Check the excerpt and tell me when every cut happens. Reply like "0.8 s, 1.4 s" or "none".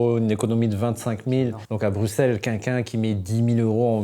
1.6 s